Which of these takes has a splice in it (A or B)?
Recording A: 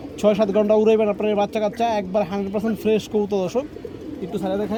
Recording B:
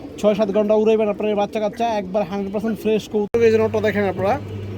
B